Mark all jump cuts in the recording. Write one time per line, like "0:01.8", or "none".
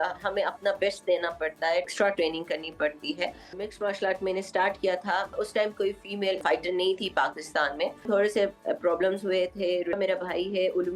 0:01.9
0:03.5
0:05.3
0:06.4
0:08.1
0:10.0